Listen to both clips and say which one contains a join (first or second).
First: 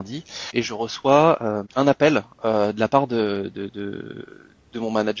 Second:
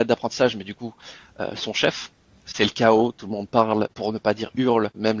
second